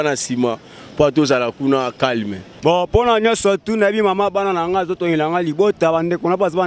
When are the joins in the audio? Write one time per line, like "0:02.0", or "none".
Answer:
none